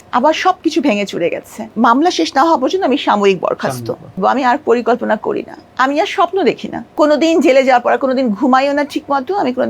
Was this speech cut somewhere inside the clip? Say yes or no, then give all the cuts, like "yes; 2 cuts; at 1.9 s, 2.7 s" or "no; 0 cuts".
yes; 3 cuts; at 1.7 s, 4.2 s, 6.8 s